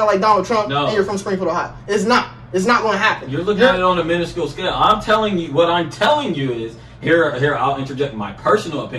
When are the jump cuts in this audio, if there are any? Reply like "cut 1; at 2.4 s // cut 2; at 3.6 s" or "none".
none